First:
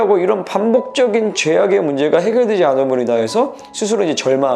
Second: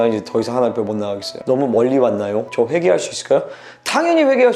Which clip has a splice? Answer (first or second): second